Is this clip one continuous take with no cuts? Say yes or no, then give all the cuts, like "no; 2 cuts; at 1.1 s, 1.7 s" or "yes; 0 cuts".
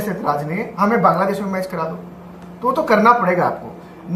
yes; 0 cuts